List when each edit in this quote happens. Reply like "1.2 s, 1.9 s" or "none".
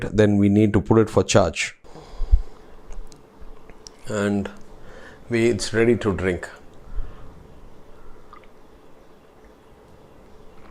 1.8 s